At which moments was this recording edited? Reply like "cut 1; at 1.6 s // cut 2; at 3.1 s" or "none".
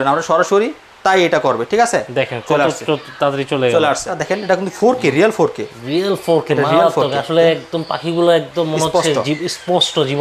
cut 1; at 4.2 s